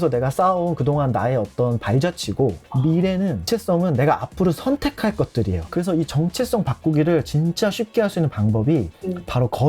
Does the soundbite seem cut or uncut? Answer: cut